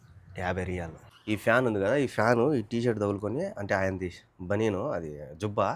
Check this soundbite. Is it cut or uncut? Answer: cut